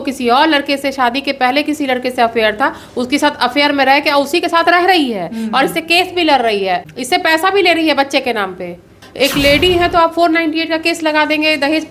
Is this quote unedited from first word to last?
no; 2 cuts; at 6.8 s, 9.1 s

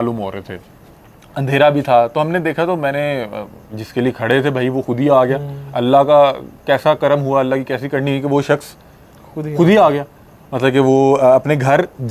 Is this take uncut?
yes; 0 cuts

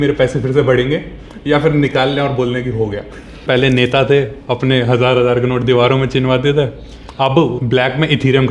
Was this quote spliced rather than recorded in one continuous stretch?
yes; 2 cuts; at 3.4 s, 7.6 s

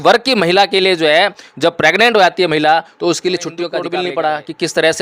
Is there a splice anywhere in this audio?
yes; 1 cut; at 3.8 s

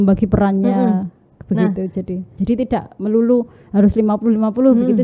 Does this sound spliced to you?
yes; 1 cut; at 2.3 s

